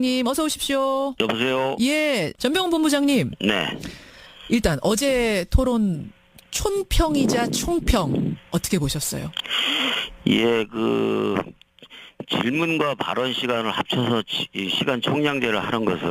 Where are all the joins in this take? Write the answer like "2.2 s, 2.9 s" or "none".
13.1 s